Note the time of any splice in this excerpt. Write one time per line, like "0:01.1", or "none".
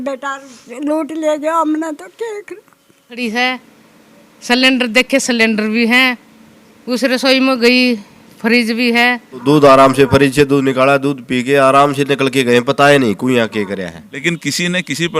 0:03.2
0:09.3
0:14.2